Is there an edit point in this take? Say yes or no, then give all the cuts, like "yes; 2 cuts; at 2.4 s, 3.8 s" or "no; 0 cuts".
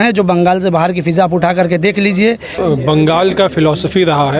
yes; 1 cut; at 2.5 s